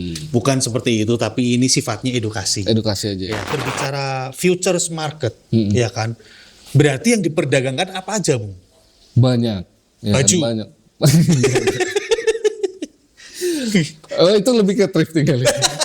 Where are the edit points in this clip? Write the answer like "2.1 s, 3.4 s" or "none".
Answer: 3.6 s